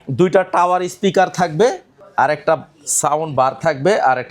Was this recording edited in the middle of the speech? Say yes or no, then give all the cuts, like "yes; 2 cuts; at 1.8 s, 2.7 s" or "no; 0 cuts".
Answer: no; 0 cuts